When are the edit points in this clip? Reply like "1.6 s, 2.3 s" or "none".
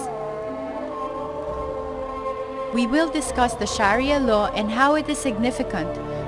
2.7 s